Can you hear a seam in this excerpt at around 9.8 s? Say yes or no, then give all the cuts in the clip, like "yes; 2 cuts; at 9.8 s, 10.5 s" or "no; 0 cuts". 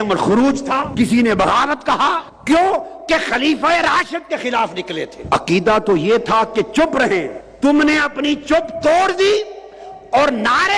no; 4 cuts; at 0.9 s, 2.3 s, 5.1 s, 7.4 s